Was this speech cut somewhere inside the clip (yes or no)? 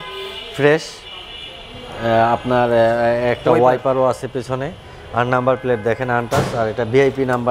no